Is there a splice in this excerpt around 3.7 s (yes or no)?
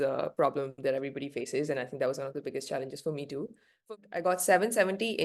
yes